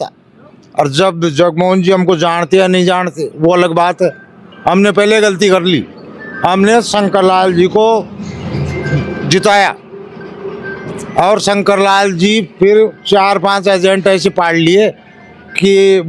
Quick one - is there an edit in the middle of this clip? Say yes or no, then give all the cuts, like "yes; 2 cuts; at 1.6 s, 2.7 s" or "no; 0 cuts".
no; 0 cuts